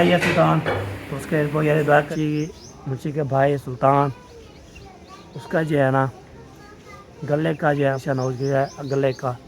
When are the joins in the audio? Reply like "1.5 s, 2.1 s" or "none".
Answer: 2.1 s, 8.0 s